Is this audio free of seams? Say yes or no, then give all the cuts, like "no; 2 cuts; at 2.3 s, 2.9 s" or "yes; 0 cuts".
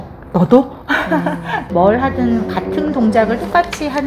no; 1 cut; at 1.6 s